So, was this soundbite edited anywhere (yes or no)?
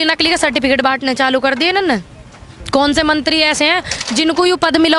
no